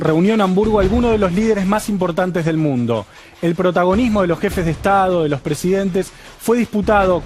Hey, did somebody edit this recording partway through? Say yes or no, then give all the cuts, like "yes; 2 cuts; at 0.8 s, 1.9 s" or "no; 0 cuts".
yes; 1 cut; at 3.3 s